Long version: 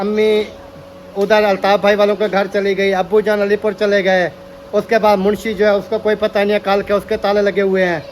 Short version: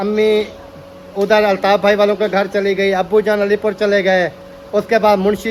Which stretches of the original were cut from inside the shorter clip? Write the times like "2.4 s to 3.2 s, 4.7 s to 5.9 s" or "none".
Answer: none